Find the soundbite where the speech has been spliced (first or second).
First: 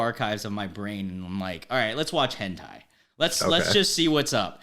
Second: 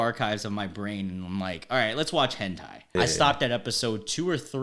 second